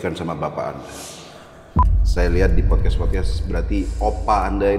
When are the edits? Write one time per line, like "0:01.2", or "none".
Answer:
0:01.6